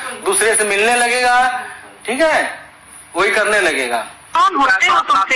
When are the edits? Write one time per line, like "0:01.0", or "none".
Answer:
0:04.3